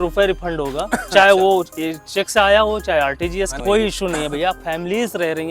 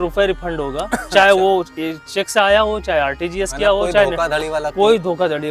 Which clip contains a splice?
first; 1 cut; at 3.5 s

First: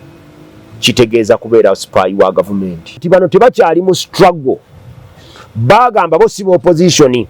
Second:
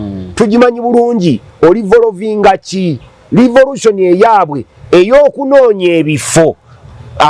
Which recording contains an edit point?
first; 1 cut; at 3.0 s

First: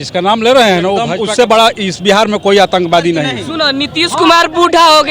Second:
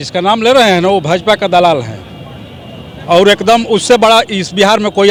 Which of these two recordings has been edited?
first; 2 cuts; at 1.3 s, 3.4 s

